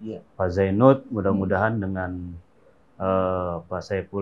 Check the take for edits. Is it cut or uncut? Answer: uncut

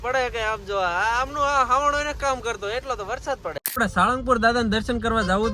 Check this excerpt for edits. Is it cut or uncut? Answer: cut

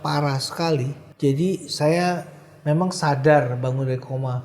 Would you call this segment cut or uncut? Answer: cut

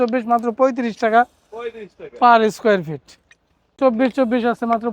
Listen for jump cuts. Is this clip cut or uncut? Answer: cut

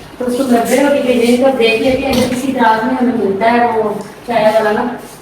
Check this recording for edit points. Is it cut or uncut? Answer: uncut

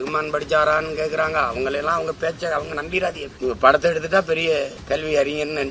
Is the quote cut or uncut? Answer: cut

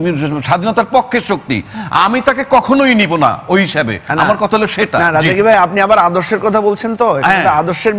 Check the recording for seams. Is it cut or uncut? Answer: uncut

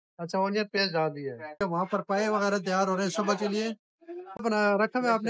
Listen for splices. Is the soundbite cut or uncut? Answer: cut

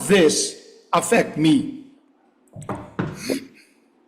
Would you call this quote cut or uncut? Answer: uncut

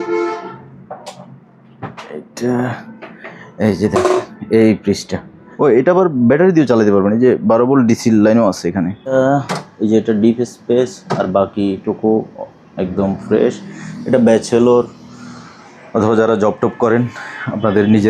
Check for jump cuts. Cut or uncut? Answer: cut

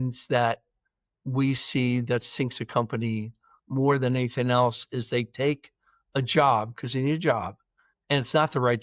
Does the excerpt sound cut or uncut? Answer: uncut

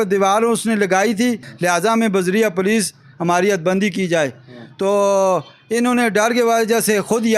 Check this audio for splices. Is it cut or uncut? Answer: cut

